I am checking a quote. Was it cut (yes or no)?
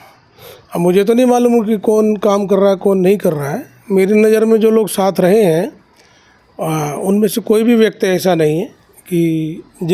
no